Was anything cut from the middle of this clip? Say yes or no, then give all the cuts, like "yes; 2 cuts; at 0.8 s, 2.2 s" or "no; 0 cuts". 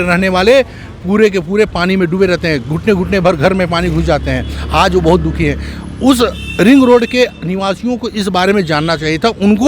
no; 0 cuts